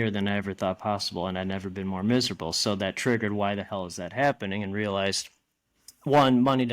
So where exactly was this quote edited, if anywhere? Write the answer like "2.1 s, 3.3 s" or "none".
none